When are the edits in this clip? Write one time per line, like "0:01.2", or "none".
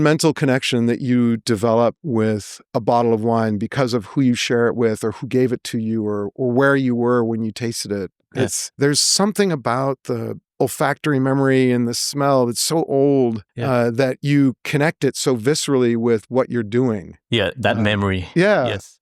none